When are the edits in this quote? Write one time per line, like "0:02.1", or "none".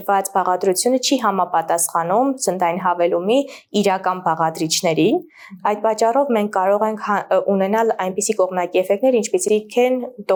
none